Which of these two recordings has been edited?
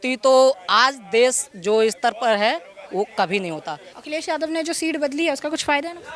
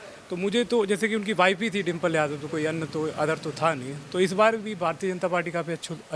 first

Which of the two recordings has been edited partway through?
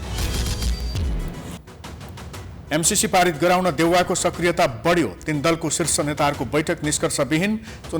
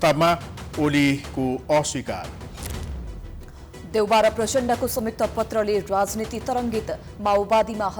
first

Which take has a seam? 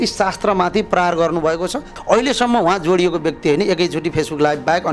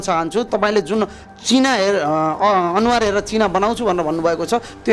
first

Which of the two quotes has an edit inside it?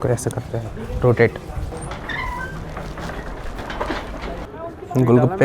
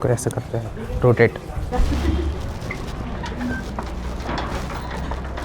first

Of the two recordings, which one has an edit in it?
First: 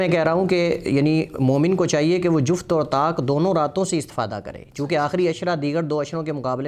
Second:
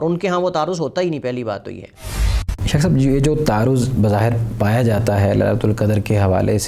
second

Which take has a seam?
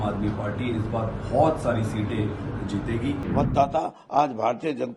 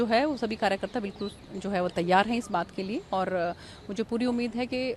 first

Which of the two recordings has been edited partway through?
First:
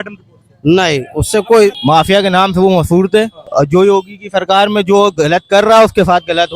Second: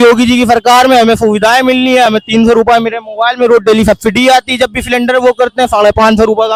first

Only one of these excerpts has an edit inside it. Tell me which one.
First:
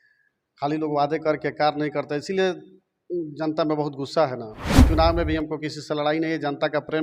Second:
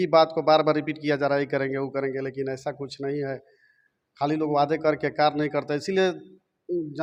first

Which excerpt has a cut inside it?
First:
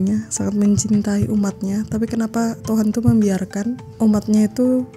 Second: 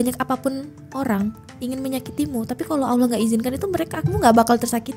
first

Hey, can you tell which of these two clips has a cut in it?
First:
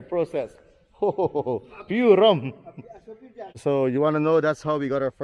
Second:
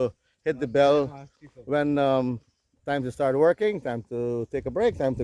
first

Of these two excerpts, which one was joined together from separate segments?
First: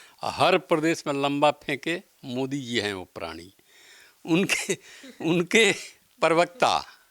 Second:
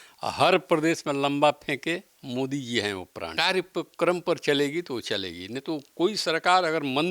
second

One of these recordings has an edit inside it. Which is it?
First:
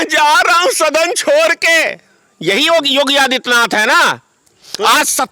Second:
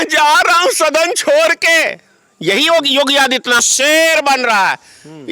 second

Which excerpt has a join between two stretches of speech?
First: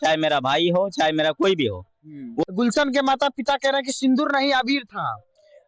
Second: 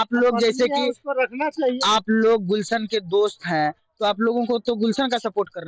first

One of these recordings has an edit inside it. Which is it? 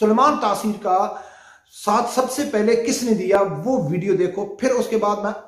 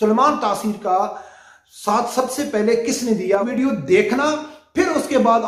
second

